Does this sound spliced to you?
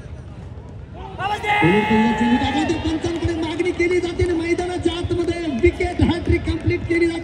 no; 0 cuts

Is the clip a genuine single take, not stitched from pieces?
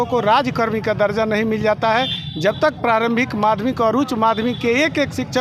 yes; 0 cuts

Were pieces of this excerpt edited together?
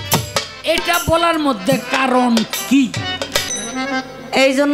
yes; 1 cut; at 3.4 s

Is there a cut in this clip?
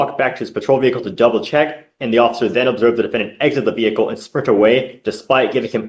no; 0 cuts

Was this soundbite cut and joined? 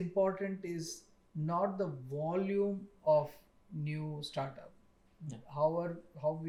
no; 0 cuts

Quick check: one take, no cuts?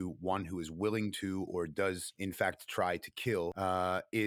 no; 2 cuts; at 2.1 s, 3.5 s

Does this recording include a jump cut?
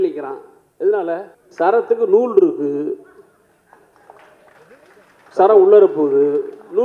yes; 1 cut; at 1.4 s

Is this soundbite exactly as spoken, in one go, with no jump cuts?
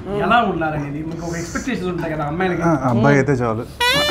yes; 0 cuts

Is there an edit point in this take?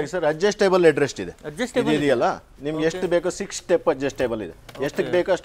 no; 0 cuts

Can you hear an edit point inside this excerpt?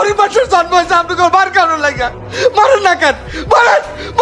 no; 0 cuts

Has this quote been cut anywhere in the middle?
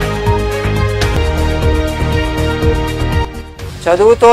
yes; 1 cut; at 1.1 s

